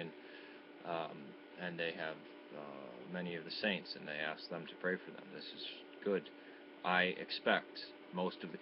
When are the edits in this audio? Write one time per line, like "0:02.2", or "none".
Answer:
0:02.1